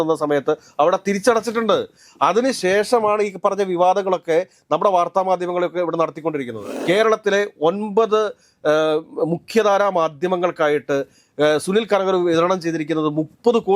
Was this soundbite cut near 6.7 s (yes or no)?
yes